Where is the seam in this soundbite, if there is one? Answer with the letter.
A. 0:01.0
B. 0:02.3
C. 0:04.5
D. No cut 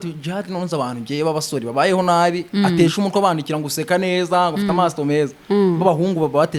D